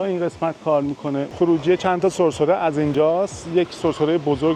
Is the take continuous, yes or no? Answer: no